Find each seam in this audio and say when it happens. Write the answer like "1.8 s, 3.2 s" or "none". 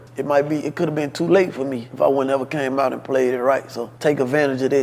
none